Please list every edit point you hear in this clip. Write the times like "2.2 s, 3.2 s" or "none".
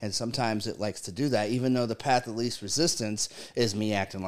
none